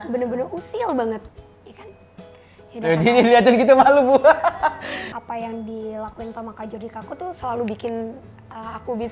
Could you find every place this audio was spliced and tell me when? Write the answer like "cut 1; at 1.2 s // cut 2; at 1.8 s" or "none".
cut 1; at 1.3 s // cut 2; at 4.9 s